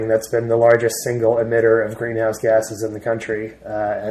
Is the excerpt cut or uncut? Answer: uncut